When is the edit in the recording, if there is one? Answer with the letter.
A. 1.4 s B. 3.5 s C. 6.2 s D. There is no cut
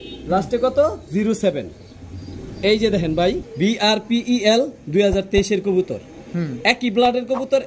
B